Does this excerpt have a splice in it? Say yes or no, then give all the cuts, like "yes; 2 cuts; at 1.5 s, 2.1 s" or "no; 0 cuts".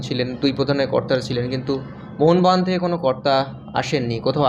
no; 0 cuts